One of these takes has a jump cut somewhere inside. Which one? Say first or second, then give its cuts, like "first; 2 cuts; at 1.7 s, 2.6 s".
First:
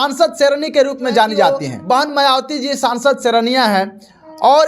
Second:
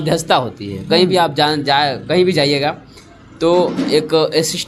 first; 1 cut; at 1.7 s